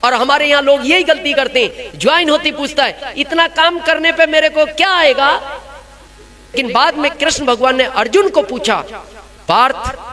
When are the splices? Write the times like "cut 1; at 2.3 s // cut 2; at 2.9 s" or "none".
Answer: cut 1; at 6.5 s